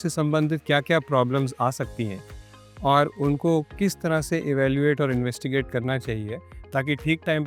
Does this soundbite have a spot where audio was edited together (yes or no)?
no